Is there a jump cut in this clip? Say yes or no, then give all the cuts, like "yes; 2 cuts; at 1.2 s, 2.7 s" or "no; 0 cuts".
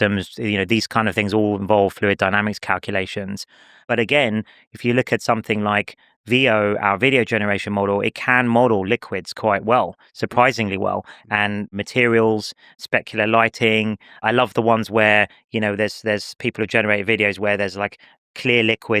yes; 1 cut; at 3.8 s